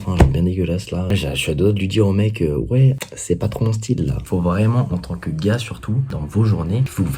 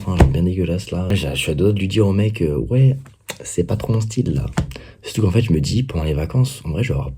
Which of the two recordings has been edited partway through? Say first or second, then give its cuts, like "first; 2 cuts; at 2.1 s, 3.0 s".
first; 3 cuts; at 3.1 s, 4.2 s, 6.1 s